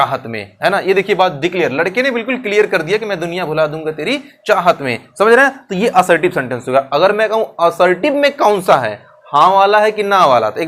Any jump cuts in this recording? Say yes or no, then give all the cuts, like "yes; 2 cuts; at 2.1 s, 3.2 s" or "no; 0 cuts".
no; 0 cuts